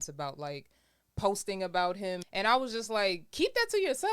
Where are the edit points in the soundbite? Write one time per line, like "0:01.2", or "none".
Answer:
0:02.2